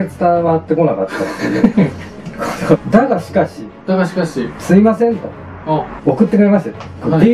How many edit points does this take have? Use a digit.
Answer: 2